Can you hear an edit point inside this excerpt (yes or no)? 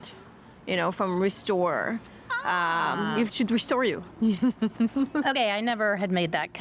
no